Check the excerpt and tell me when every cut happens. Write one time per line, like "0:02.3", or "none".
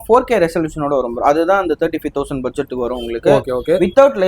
none

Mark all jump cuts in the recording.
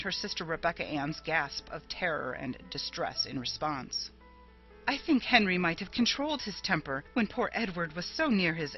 0:03.3

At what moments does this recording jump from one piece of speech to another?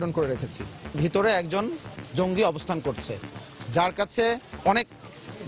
0:01.0
0:04.5

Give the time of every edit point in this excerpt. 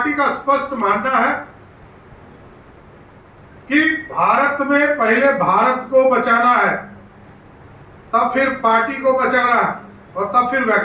none

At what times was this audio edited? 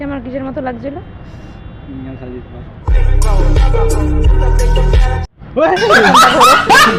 none

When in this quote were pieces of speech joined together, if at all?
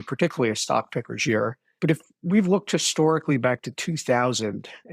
0:01.6

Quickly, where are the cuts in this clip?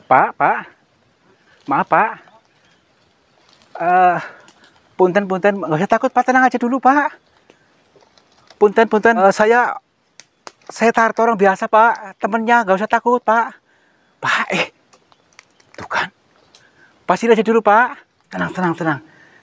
0:09.2
0:18.4

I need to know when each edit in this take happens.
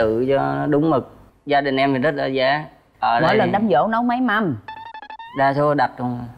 0:01.2

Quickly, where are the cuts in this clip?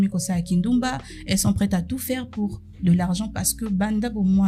none

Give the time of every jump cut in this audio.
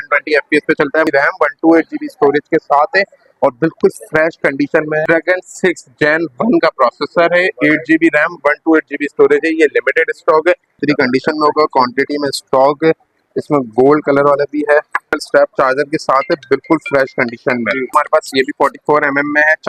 0:01.1
0:05.0
0:10.7
0:15.2
0:17.9

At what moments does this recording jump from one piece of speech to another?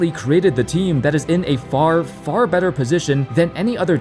none

